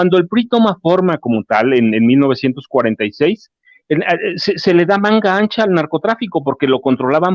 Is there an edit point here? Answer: no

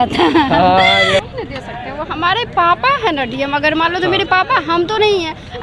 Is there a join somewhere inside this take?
yes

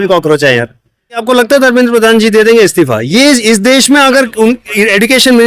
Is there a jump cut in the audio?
yes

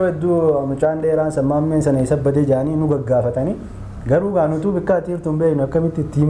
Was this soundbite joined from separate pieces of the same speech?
no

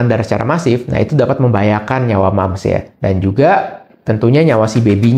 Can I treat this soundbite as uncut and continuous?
yes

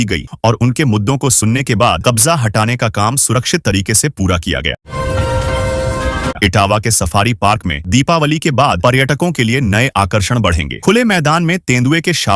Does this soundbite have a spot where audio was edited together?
yes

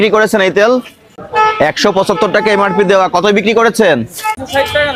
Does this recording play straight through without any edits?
yes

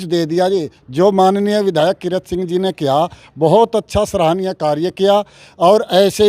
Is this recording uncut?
yes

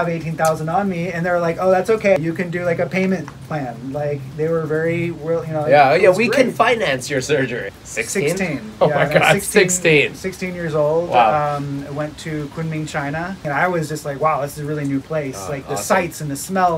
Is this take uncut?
no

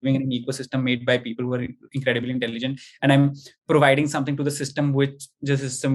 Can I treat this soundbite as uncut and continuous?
yes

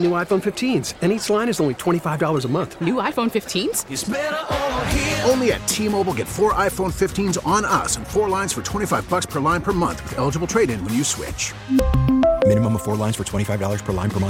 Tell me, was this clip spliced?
no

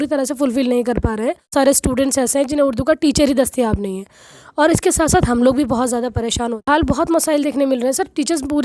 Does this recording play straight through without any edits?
no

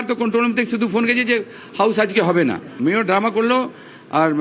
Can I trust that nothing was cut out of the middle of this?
yes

